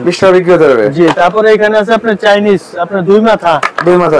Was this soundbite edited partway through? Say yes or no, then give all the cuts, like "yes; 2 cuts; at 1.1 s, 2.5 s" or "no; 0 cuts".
no; 0 cuts